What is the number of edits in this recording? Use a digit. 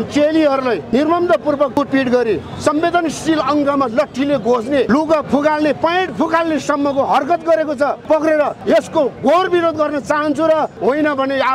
6